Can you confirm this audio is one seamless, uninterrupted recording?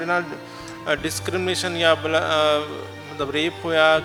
yes; 0 cuts

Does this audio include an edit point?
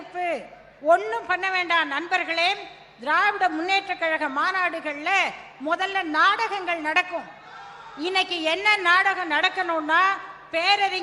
no; 0 cuts

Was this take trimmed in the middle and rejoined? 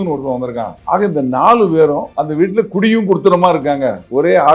no; 0 cuts

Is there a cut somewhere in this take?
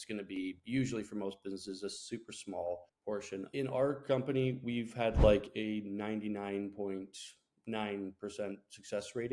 yes; 1 cut; at 3.2 s

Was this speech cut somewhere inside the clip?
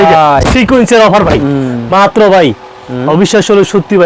no; 0 cuts

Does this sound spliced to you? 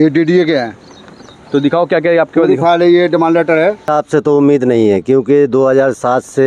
yes; 1 cut; at 3.8 s

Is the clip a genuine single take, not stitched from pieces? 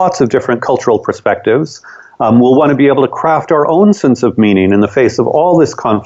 yes; 0 cuts

